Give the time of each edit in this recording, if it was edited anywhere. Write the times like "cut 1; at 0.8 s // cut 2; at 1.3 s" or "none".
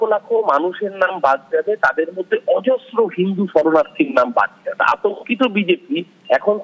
cut 1; at 4.8 s